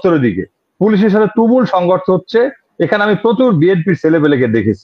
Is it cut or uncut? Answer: uncut